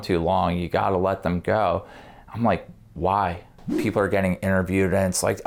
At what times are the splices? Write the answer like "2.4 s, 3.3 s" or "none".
3.7 s